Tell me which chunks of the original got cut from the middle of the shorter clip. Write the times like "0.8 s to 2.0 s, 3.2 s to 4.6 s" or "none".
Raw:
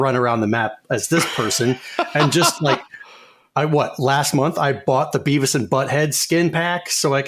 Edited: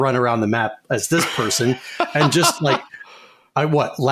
none